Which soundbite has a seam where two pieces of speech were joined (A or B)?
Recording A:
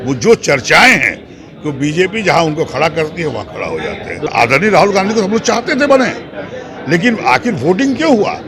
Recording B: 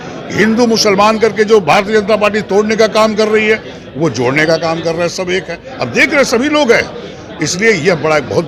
A